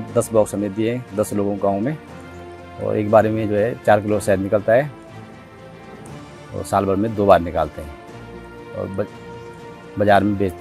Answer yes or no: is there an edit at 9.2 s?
no